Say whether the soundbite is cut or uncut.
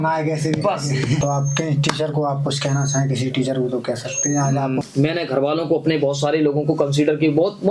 cut